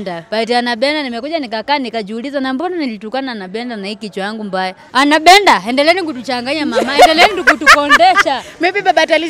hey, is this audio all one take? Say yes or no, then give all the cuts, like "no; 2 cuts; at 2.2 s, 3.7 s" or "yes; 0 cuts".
no; 1 cut; at 4.8 s